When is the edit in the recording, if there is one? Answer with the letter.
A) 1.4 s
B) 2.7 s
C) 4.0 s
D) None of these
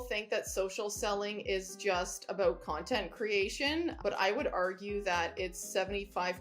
C